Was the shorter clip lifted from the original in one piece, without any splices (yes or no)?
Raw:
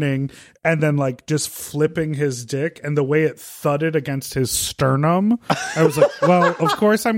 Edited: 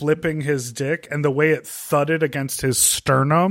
yes